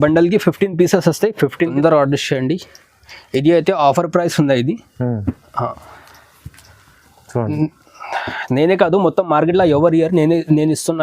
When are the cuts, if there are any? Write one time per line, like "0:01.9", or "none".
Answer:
0:01.7